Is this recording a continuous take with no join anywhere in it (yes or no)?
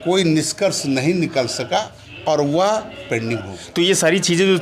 no